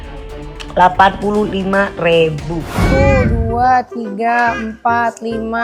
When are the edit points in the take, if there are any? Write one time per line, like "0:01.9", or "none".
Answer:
0:02.8